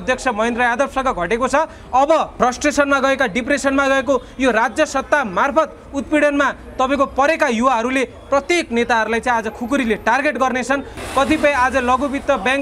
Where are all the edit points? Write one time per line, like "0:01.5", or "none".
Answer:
0:02.3
0:10.9